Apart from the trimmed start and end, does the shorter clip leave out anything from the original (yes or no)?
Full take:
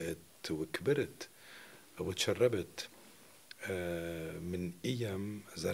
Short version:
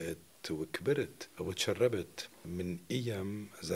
yes